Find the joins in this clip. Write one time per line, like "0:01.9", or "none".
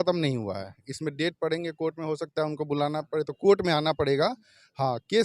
none